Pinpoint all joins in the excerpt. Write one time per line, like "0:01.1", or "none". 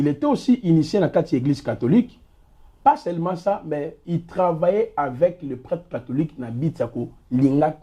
none

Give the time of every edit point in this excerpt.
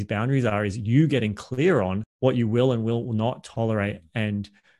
none

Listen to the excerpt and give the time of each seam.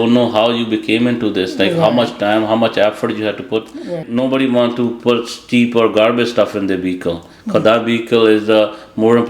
0:04.0

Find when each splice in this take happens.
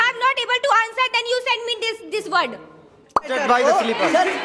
0:03.3

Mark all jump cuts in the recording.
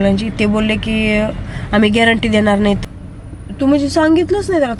0:02.8

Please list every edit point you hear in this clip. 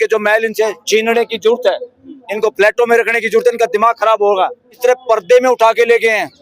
0:04.8

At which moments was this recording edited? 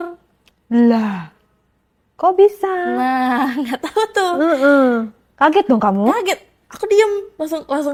none

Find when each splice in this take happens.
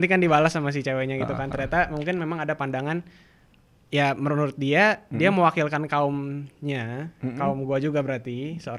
none

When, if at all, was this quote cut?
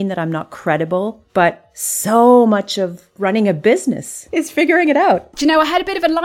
0:01.2
0:03.0
0:04.1
0:05.3

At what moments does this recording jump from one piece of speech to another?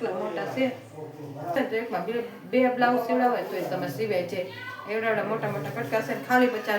0:01.6

